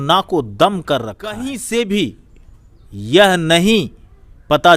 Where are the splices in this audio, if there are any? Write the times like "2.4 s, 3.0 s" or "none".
1.5 s